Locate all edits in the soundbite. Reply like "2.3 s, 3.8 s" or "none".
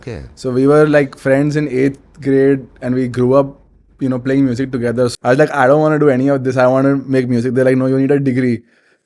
5.1 s